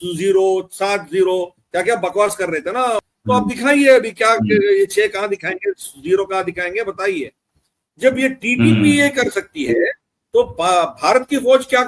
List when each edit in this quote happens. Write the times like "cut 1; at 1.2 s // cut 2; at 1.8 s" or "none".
cut 1; at 3.0 s